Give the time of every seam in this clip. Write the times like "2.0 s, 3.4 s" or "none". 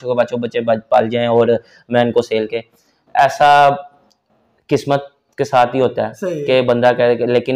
none